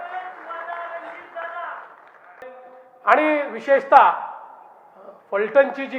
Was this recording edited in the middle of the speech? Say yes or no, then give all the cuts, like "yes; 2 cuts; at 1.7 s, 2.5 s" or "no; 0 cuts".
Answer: yes; 1 cut; at 2.5 s